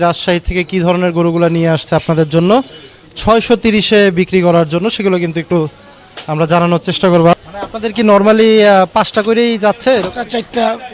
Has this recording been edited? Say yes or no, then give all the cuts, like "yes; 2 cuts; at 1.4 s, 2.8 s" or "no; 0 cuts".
yes; 1 cut; at 7.4 s